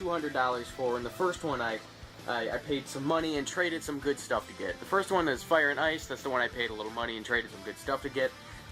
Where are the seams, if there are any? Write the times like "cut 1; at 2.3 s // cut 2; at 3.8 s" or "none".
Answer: none